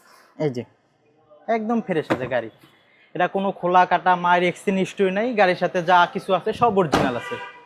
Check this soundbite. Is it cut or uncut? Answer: uncut